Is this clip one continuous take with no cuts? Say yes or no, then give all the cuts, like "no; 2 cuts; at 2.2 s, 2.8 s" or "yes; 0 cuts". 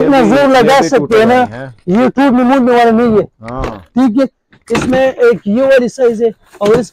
yes; 0 cuts